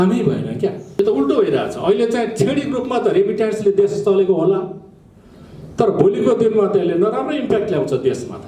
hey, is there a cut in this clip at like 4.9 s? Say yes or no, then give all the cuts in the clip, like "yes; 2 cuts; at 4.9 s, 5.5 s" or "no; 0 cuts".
no; 1 cut; at 1.0 s